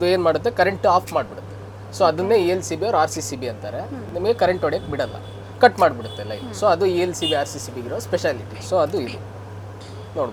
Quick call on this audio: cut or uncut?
uncut